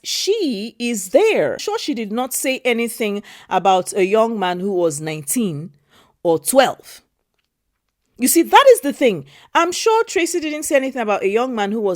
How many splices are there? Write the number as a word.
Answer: one